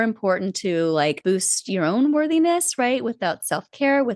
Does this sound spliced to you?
yes; 1 cut; at 1.2 s

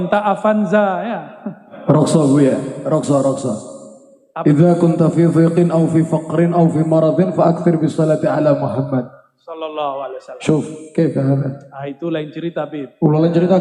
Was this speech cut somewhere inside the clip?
yes; 1 cut; at 1.7 s

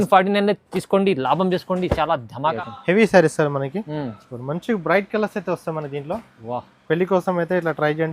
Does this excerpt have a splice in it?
yes; 1 cut; at 2.6 s

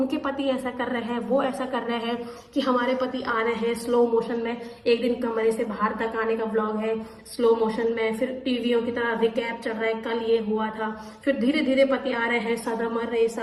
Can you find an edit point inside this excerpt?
no; 0 cuts

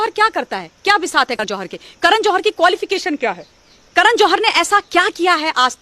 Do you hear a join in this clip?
yes; 1 cut; at 1.4 s

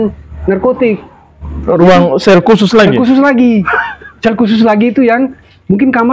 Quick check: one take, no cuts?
yes; 0 cuts

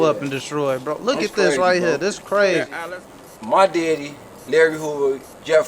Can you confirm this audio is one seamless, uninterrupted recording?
no; 1 cut; at 2.8 s

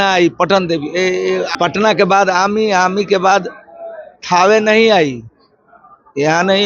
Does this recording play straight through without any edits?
no; 1 cut; at 1.6 s

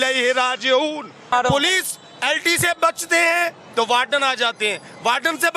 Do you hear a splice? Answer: yes; 1 cut; at 1.3 s

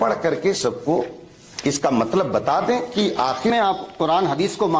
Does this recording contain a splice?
yes; 1 cut; at 3.5 s

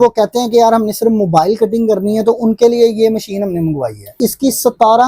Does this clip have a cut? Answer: yes; 1 cut; at 4.2 s

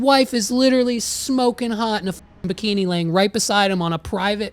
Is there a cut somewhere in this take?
no; 0 cuts

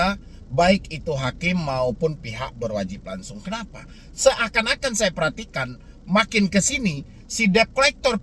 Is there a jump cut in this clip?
no; 0 cuts

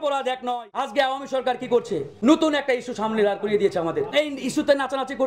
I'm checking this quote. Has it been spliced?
yes; 3 cuts; at 0.9 s, 2.1 s, 4.1 s

